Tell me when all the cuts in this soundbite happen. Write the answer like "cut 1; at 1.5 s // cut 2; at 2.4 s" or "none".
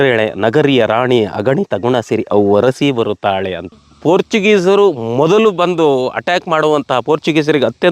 cut 1; at 3.8 s